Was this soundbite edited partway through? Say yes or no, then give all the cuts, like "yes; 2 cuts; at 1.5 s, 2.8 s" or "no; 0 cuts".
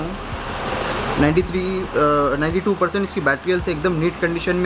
no; 0 cuts